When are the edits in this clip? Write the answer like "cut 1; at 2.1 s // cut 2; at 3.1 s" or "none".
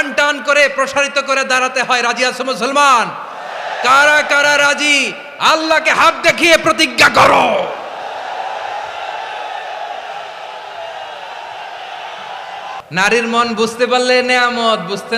cut 1; at 12.8 s